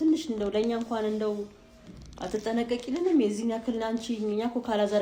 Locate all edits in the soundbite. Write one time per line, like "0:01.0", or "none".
none

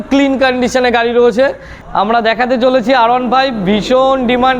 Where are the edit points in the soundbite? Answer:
0:01.7

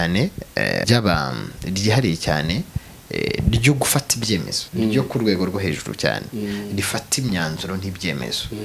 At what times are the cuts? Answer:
0:00.8
0:04.6

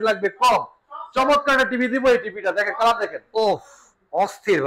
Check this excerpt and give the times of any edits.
none

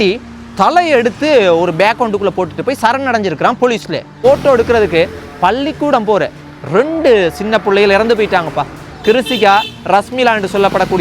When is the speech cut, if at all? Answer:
0:04.2

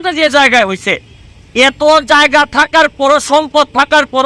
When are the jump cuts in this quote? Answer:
none

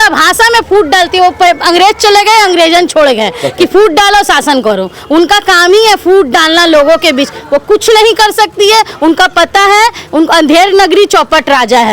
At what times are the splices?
none

